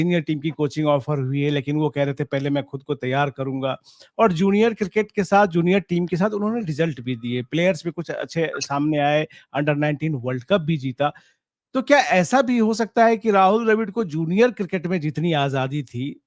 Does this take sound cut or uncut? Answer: uncut